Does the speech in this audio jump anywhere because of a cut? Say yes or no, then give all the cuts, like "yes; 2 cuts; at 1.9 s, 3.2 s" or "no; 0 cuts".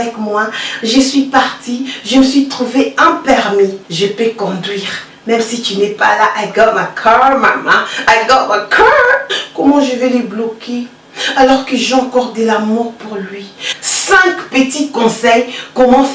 yes; 3 cuts; at 3.8 s, 9.4 s, 13.7 s